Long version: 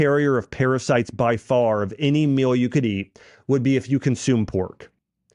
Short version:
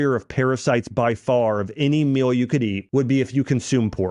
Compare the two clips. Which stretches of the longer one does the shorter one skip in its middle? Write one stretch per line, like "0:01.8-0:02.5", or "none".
0:03.0-0:03.4